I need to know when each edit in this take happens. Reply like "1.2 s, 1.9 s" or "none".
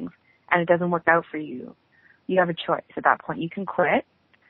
none